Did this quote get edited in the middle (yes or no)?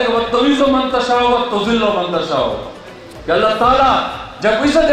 no